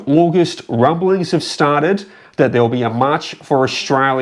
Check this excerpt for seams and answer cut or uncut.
uncut